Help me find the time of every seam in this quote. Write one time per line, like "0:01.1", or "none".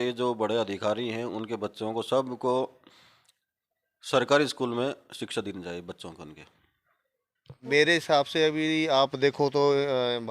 0:07.6